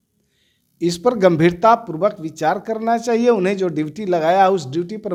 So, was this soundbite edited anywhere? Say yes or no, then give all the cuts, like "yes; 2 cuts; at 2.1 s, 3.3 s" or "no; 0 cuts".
no; 0 cuts